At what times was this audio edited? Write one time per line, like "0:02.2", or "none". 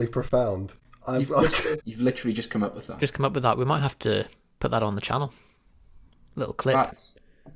0:01.9

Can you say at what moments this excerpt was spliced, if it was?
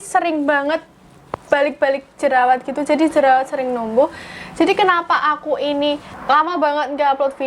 0:06.1

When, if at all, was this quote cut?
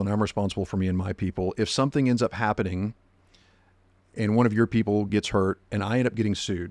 none

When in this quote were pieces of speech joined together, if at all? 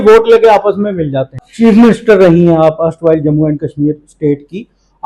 0:01.4

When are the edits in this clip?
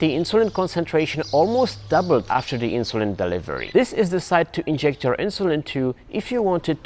0:02.3
0:03.6

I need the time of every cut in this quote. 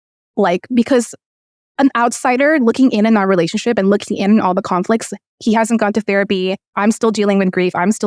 none

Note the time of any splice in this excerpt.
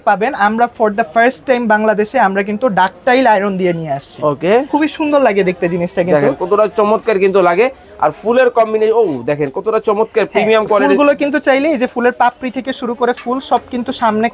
0:04.7

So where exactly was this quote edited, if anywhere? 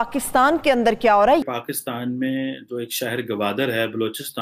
0:01.4

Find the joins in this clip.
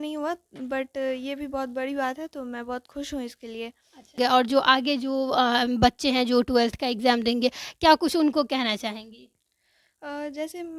0:04.1

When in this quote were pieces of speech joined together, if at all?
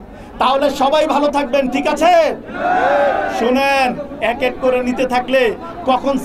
none

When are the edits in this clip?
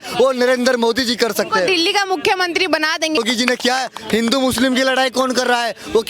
0:03.2

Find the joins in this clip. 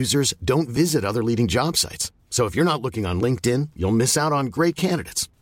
none

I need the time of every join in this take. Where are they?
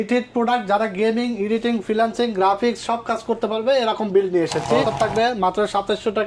0:04.9

